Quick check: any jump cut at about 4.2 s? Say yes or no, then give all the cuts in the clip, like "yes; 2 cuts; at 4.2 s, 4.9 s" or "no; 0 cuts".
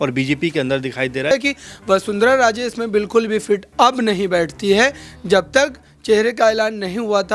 no; 1 cut; at 1.3 s